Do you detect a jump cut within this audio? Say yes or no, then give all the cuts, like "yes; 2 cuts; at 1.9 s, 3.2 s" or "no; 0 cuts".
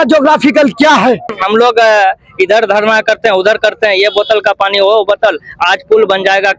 yes; 1 cut; at 1.3 s